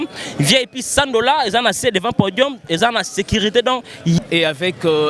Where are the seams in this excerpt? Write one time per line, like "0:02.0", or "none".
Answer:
0:04.2